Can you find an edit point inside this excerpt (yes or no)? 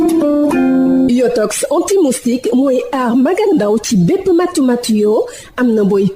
yes